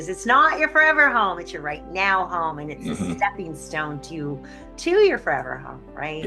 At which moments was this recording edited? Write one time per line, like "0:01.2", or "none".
none